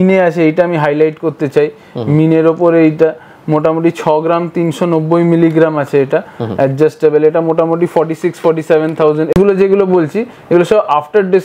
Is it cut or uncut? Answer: uncut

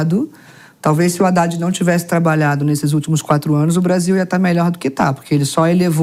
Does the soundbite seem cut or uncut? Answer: uncut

